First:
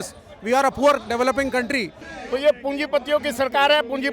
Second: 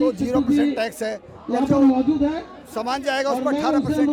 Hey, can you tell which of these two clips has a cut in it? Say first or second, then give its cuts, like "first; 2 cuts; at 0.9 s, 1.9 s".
first; 1 cut; at 2.0 s